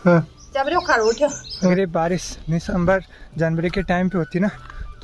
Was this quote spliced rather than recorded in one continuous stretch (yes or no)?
yes